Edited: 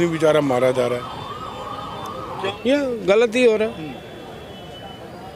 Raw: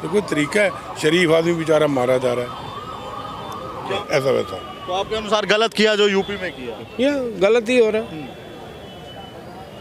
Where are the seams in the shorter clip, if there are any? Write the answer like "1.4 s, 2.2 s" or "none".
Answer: 2.4 s